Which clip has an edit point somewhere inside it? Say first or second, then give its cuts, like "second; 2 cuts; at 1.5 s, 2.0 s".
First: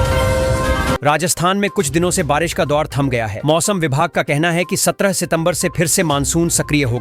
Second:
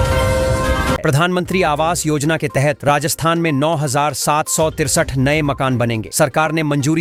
first; 1 cut; at 1.0 s